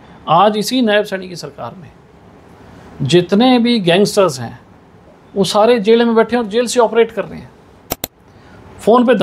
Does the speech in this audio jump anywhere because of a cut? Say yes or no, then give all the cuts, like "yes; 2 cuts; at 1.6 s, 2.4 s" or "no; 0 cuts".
no; 0 cuts